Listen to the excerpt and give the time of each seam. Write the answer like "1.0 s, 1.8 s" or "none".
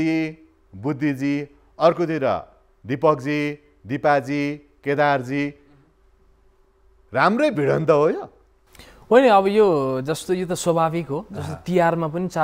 none